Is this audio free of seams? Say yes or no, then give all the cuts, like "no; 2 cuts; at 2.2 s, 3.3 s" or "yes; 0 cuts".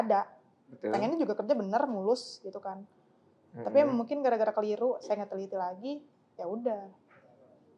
yes; 0 cuts